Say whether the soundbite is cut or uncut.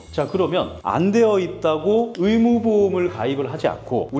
uncut